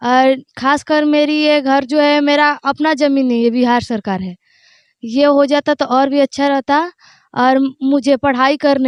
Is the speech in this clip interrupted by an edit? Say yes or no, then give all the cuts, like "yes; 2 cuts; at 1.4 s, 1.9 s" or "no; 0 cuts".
no; 0 cuts